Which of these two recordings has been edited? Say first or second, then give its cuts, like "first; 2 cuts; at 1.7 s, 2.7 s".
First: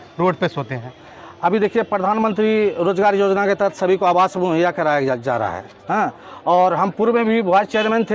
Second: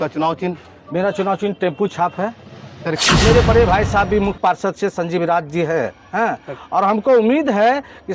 second; 1 cut; at 3.0 s